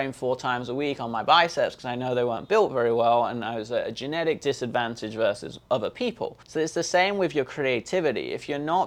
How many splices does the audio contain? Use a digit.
2